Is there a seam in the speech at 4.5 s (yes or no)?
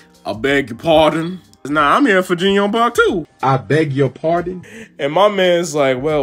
yes